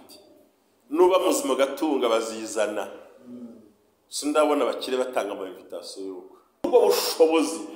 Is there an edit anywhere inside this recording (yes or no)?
yes